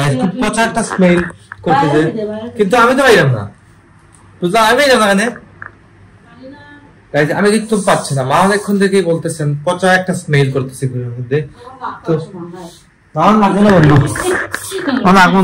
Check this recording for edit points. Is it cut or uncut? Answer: uncut